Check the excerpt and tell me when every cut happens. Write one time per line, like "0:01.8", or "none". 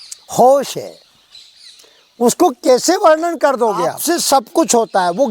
0:04.0